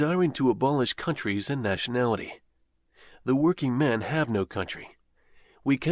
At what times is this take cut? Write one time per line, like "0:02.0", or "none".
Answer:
0:03.9